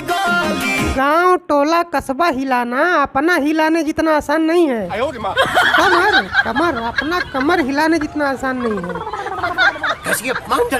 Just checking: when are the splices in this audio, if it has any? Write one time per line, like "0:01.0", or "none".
0:00.9